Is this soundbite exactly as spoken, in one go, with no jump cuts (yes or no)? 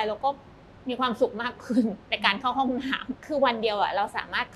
no